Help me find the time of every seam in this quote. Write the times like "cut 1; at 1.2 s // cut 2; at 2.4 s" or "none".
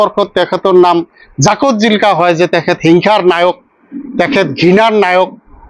none

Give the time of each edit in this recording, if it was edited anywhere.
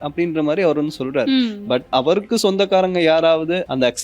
cut 1; at 1.9 s

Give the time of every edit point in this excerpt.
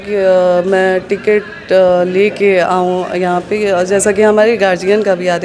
none

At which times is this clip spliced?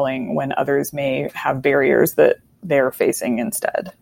cut 1; at 2.5 s

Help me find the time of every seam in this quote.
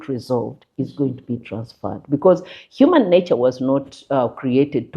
none

